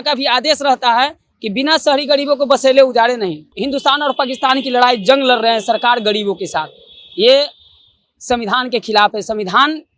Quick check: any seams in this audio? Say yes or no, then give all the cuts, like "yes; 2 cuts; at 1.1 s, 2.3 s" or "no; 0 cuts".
yes; 1 cut; at 3.5 s